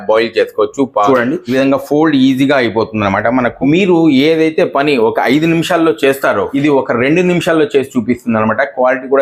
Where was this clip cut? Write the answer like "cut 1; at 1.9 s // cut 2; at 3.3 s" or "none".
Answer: cut 1; at 1.1 s // cut 2; at 3.6 s // cut 3; at 6.5 s